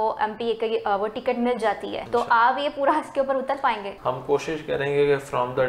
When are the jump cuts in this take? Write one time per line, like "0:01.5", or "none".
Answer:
0:01.9
0:03.9